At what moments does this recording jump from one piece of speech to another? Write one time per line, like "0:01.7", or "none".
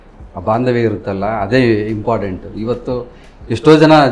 none